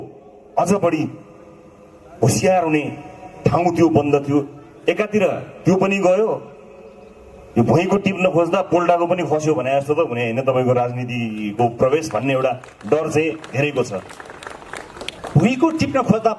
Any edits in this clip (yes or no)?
no